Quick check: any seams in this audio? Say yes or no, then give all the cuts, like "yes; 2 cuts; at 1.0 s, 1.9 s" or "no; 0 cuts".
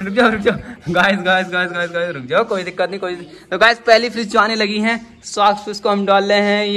no; 0 cuts